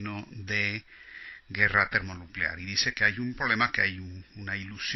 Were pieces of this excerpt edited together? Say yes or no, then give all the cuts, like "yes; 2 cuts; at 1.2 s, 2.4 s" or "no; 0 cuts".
yes; 1 cut; at 0.9 s